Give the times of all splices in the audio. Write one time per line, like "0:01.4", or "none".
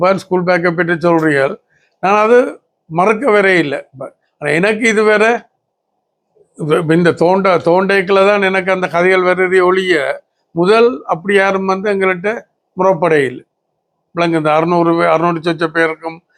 none